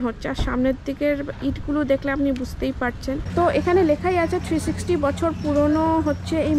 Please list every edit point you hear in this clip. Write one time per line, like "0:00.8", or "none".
0:03.2